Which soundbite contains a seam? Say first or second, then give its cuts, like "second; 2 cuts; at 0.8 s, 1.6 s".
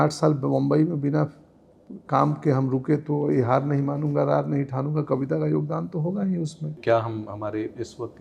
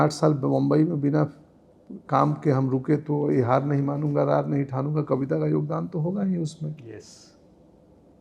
first; 1 cut; at 6.8 s